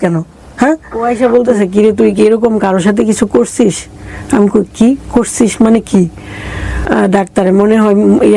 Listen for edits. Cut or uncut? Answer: cut